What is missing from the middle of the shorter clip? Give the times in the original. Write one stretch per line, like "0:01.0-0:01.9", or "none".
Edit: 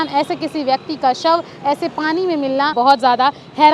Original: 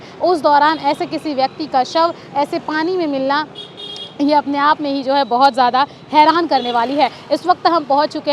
0:03.4-0:05.3